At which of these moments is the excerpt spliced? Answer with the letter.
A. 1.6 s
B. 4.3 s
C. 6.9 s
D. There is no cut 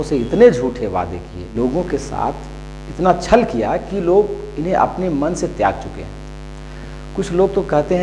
A